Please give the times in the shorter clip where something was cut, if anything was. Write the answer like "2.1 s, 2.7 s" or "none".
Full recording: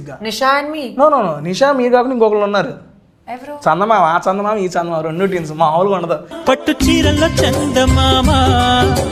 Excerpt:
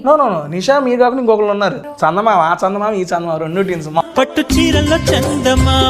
1.9 s, 4.0 s